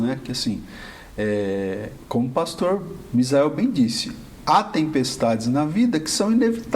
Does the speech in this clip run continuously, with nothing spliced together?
no; 1 cut; at 1.9 s

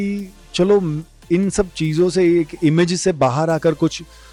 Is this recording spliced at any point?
no; 0 cuts

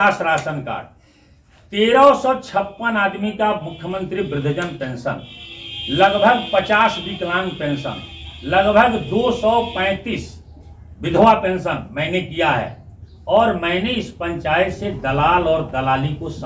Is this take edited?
no; 0 cuts

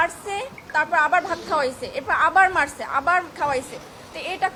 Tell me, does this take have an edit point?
no; 0 cuts

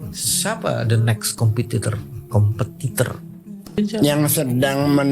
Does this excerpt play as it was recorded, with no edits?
no; 1 cut; at 3.8 s

